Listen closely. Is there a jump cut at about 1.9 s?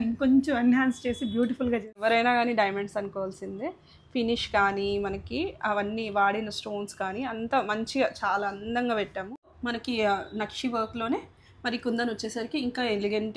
yes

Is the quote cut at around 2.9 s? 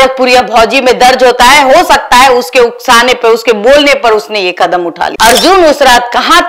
no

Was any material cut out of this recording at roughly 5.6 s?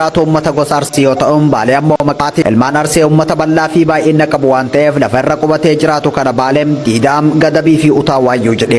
no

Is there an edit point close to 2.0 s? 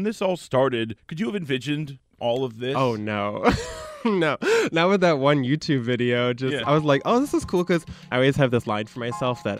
yes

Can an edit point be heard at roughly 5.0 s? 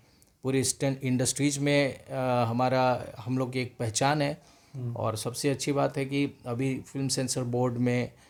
no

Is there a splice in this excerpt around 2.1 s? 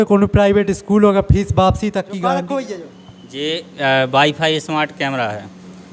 yes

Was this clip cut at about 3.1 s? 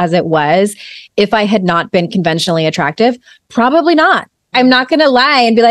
no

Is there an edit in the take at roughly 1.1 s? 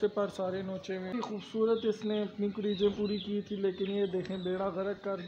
yes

